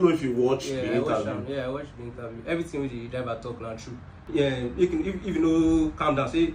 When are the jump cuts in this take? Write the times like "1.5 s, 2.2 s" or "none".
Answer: 4.3 s